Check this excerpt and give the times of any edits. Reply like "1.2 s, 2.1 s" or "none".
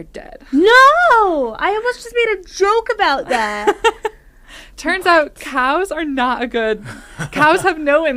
none